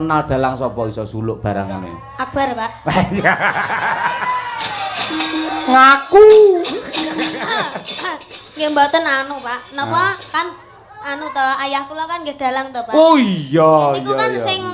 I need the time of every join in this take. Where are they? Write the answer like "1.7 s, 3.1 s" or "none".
none